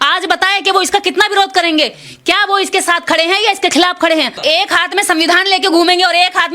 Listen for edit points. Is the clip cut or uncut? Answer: cut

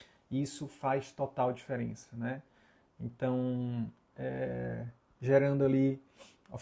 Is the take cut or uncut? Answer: uncut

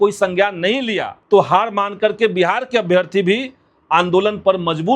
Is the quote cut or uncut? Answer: cut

